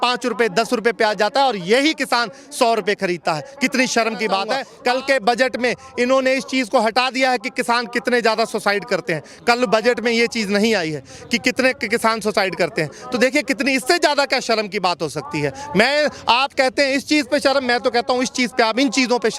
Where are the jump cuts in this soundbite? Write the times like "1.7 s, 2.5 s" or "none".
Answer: 4.7 s